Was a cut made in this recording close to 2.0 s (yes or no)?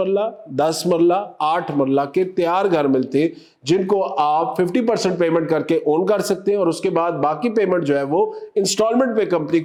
no